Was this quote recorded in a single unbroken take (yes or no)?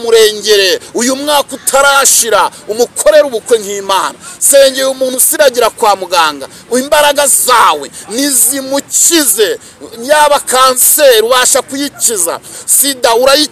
yes